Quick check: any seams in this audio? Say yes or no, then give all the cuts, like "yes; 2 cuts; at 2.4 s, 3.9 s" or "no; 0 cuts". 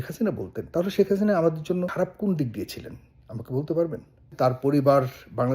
yes; 2 cuts; at 1.9 s, 4.3 s